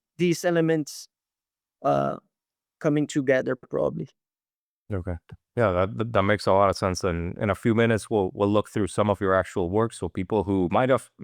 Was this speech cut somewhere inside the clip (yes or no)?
no